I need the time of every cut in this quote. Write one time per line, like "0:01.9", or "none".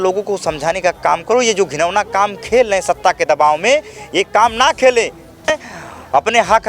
0:05.6